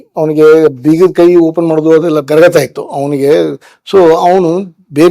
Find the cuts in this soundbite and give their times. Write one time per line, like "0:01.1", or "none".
0:02.2